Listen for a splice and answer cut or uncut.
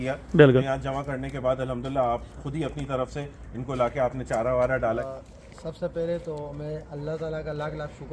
cut